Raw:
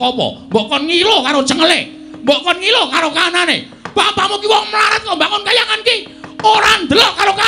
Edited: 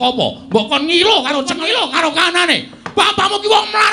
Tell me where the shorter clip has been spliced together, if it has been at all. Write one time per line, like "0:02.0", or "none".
0:01.5

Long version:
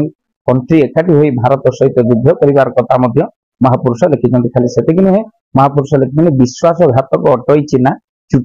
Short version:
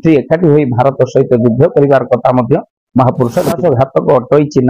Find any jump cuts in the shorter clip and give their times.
0:03.6

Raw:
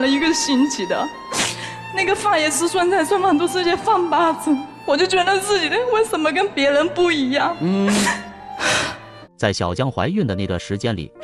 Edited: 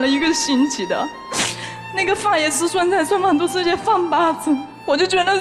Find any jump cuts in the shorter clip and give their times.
none

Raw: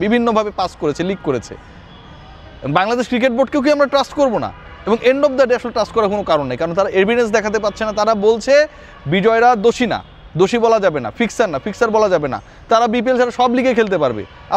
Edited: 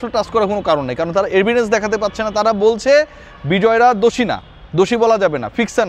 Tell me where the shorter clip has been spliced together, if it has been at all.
none

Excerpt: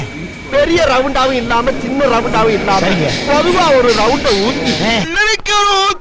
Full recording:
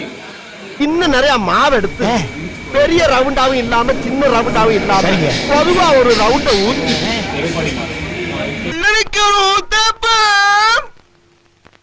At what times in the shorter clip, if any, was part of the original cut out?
0:05.1

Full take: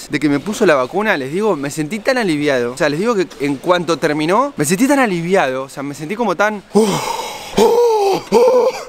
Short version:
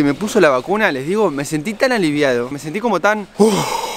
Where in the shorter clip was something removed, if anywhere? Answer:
0:02.5

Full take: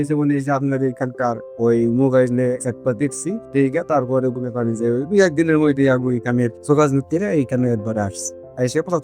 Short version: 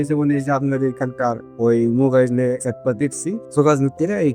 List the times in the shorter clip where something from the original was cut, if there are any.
0:03.4

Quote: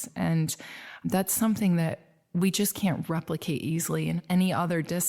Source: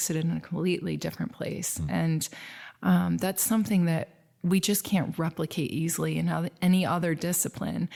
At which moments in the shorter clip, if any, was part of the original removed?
0:01.1
0:04.2

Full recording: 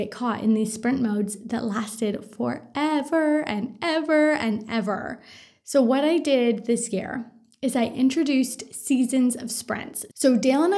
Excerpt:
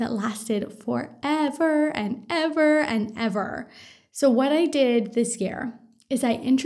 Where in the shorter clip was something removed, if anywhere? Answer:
none

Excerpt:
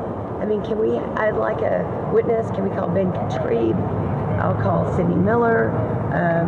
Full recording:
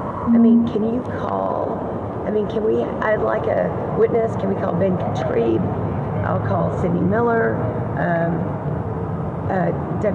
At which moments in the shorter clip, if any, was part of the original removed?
none

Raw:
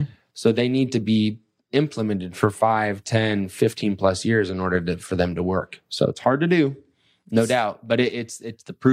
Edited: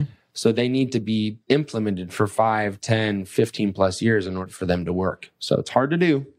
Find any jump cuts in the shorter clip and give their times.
0:01.4
0:04.5

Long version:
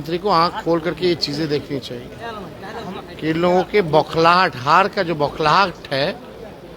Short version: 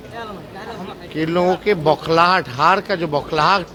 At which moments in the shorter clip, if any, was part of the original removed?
none

